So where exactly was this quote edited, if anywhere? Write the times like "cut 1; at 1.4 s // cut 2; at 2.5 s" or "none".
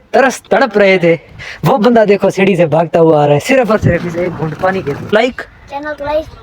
cut 1; at 5.1 s